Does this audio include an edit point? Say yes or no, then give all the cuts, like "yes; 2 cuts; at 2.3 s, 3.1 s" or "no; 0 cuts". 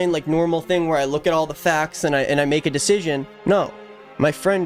no; 0 cuts